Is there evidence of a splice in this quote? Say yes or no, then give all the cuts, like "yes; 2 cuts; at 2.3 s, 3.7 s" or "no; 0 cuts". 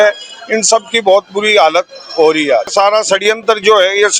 yes; 1 cut; at 2.7 s